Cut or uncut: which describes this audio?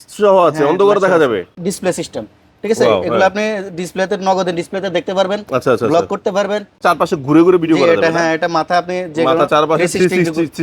cut